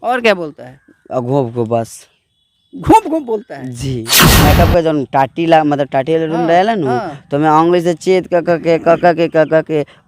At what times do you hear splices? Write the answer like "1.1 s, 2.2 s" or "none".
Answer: 4.2 s